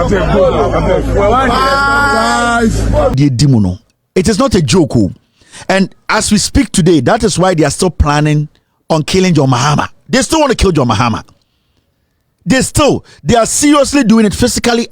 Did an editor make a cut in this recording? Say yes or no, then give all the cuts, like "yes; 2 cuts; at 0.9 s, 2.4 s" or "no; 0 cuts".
yes; 1 cut; at 3.1 s